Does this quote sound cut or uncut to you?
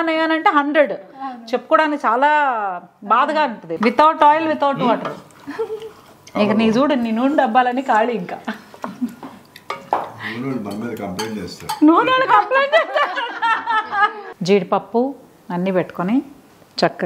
cut